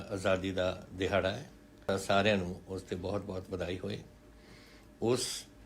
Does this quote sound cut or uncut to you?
cut